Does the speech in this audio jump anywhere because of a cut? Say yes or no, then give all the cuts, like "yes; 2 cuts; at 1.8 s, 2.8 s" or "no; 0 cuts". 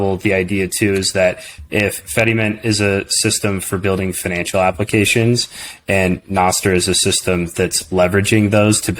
no; 0 cuts